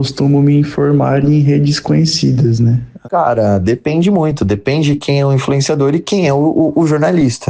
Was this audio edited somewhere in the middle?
yes; 1 cut; at 2.9 s

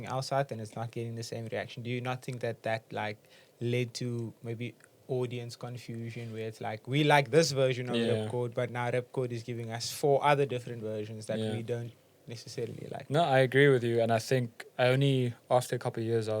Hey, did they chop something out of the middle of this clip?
no; 0 cuts

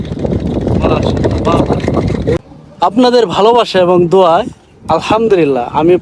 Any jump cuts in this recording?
yes; 1 cut; at 2.4 s

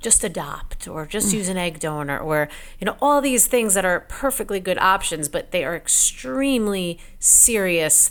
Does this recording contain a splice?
no; 0 cuts

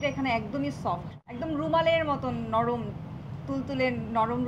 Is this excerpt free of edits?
no; 1 cut; at 1.2 s

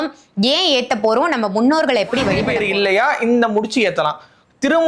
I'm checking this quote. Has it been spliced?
yes; 1 cut; at 2.5 s

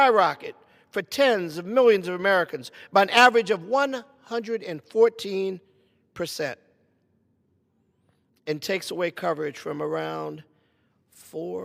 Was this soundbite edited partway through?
no; 0 cuts

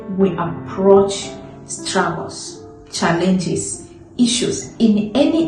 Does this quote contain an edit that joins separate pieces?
no; 0 cuts

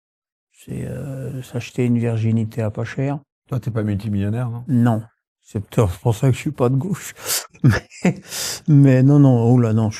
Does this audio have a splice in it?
no; 0 cuts

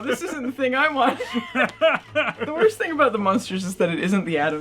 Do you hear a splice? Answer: yes; 1 cut; at 2.4 s

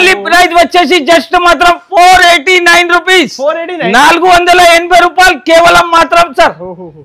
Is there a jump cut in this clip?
no; 0 cuts

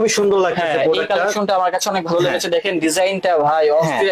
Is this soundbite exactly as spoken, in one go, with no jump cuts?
yes; 0 cuts

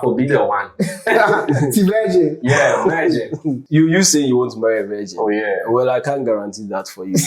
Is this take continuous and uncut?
no; 1 cut; at 3.6 s

